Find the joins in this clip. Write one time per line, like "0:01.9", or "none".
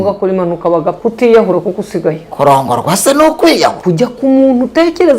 0:00.9
0:02.0
0:03.8